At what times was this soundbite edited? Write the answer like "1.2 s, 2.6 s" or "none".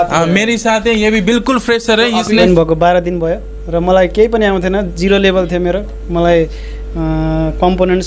2.4 s